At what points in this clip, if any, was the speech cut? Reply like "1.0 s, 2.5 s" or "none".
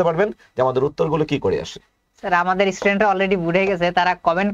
none